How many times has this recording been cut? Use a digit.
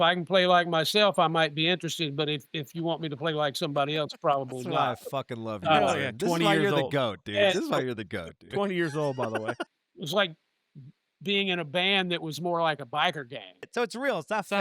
2